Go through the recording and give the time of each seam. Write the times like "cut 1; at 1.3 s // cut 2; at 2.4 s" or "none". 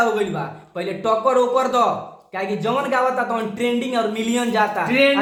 none